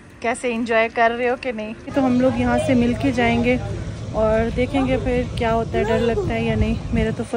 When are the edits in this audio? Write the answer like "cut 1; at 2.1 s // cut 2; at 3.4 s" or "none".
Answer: cut 1; at 1.9 s

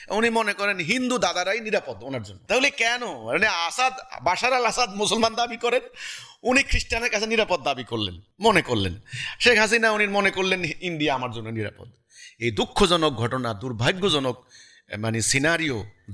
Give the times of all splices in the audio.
cut 1; at 2.3 s // cut 2; at 8.2 s

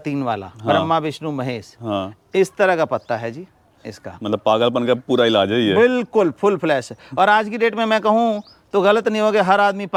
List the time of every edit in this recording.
none

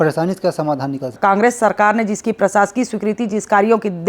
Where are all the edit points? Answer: cut 1; at 1.1 s

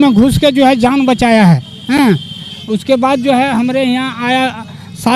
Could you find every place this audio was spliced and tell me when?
none

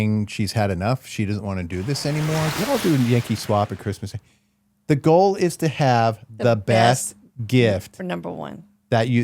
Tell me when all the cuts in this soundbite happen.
cut 1; at 2.5 s

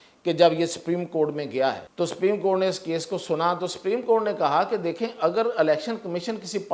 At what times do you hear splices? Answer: cut 1; at 1.9 s

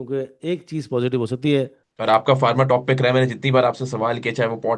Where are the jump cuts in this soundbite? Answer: cut 1; at 1.8 s

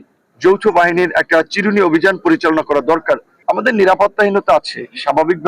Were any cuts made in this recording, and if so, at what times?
cut 1; at 3.3 s

